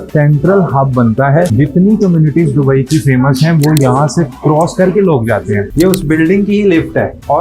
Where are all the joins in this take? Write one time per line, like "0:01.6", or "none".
0:01.5
0:05.6